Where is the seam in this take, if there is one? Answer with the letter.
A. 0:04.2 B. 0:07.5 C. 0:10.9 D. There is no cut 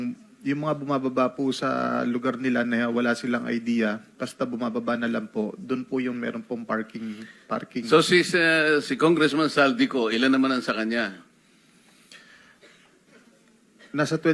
D